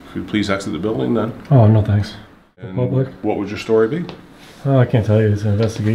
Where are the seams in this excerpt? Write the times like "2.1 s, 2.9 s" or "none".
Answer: 2.7 s